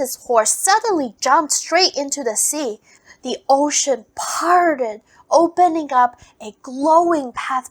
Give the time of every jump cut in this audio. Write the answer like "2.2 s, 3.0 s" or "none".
2.9 s

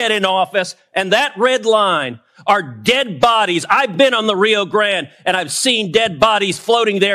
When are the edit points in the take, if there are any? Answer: none

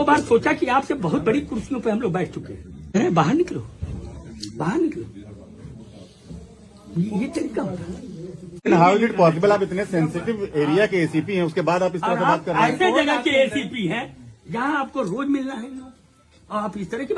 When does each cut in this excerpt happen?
3.0 s, 8.7 s

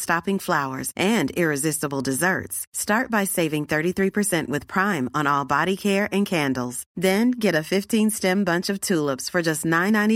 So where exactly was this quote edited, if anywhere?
none

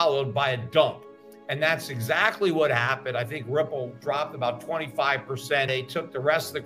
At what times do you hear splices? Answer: 5.7 s

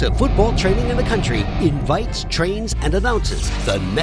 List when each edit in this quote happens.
none

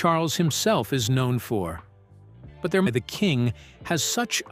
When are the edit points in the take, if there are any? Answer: none

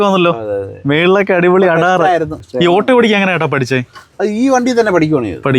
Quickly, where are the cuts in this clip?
2.4 s

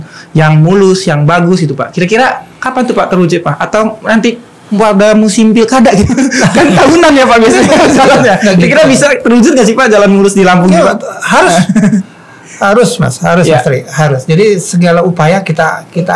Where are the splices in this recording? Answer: none

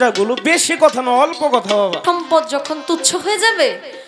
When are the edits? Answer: 2.0 s

